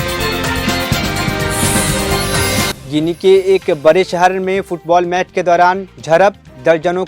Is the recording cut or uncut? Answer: uncut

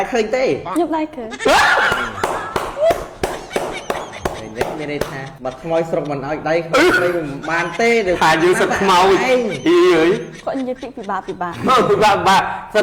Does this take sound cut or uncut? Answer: uncut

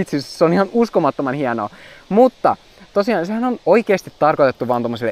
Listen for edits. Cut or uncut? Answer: uncut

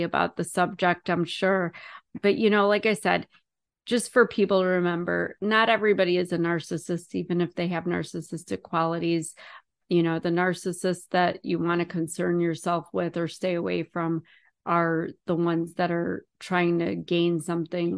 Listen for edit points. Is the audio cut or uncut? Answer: cut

